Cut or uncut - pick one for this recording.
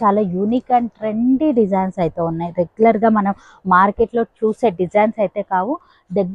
uncut